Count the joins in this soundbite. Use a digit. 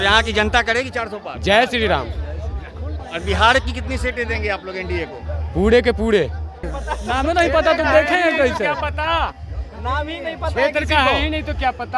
2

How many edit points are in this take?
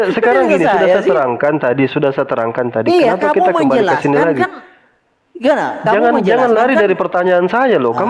0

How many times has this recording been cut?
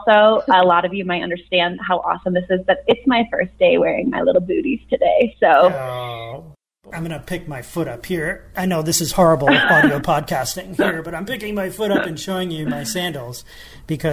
1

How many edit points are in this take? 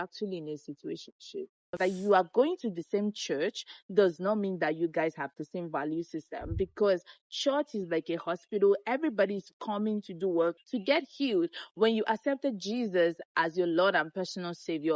1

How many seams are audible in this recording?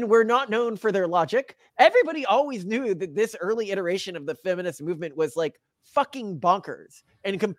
1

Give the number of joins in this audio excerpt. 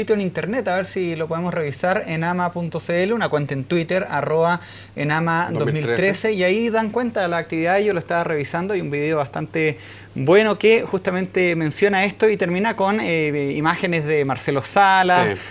1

